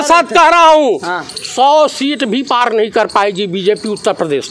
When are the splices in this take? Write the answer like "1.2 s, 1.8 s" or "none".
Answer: none